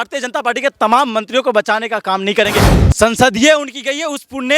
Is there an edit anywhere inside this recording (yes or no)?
yes